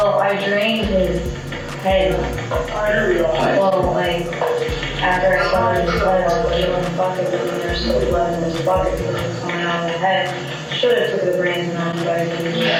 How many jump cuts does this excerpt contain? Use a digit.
0